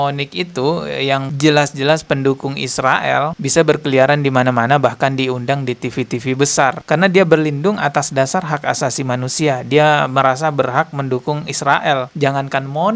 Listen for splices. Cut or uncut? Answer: cut